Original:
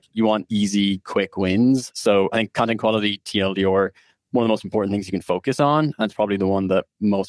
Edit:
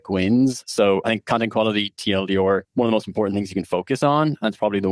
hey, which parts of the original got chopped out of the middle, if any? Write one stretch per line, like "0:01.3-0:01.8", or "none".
0:03.9-0:04.2